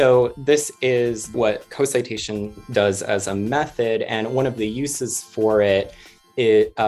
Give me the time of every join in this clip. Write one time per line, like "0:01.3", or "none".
0:01.3